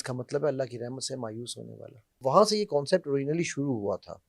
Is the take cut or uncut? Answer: cut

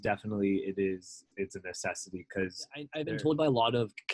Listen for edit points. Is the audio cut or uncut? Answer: cut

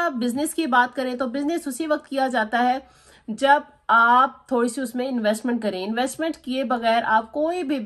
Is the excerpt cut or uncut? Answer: uncut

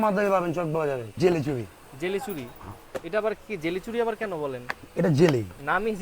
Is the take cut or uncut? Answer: cut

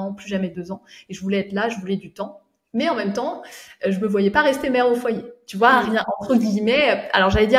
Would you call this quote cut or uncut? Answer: uncut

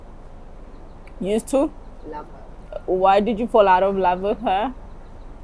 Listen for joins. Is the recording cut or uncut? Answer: uncut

